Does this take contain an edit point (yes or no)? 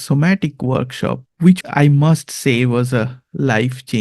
yes